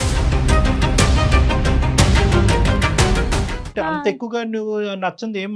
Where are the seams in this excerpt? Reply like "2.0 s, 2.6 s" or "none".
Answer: 3.6 s

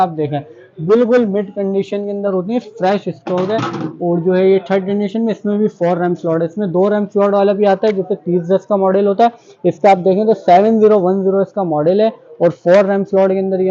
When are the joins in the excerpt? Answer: none

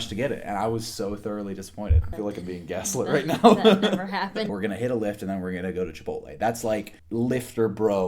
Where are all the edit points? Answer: 2.0 s, 4.5 s, 7.0 s

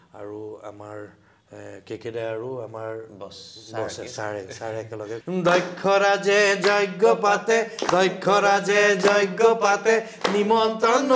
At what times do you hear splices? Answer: 5.2 s

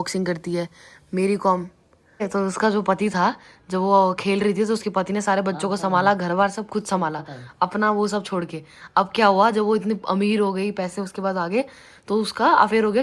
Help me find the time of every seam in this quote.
2.3 s

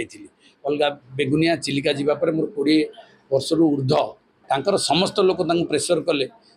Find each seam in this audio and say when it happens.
4.3 s

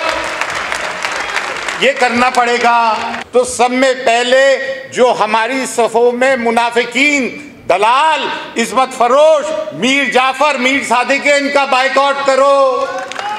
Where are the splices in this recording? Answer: 3.1 s

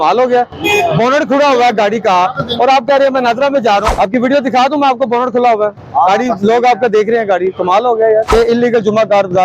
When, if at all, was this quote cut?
3.9 s, 8.3 s

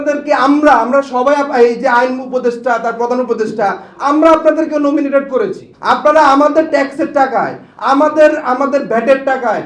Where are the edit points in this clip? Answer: 5.7 s

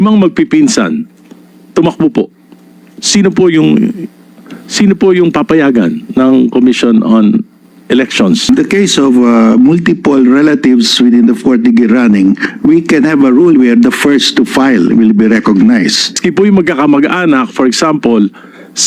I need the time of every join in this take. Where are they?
8.5 s, 16.2 s

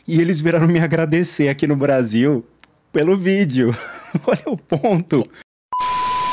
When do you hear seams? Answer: 5.4 s

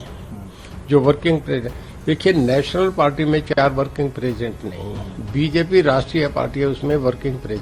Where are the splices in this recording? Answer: none

